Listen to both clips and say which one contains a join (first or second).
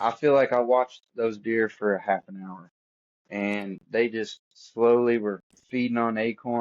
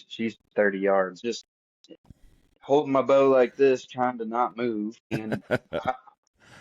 second